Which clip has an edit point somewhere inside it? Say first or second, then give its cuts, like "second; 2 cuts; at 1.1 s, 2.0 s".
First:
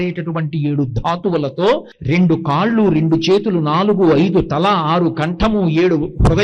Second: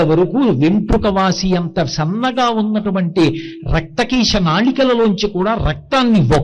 first; 1 cut; at 1.9 s